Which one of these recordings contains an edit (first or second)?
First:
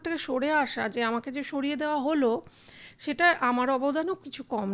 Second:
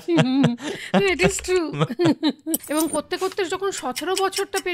second